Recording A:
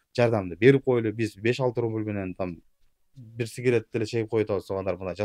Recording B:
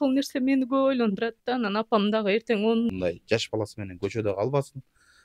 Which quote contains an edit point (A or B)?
B